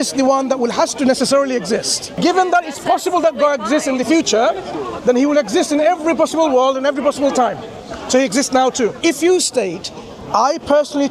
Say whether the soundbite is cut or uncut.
cut